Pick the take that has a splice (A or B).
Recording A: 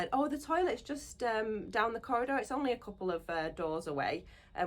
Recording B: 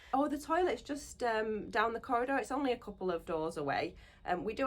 B